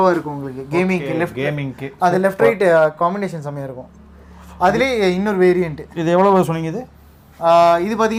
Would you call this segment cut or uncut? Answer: uncut